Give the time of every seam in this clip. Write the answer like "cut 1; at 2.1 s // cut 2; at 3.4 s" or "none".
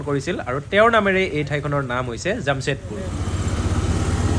none